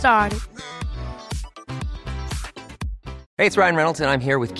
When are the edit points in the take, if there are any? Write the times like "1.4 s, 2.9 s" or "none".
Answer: 3.2 s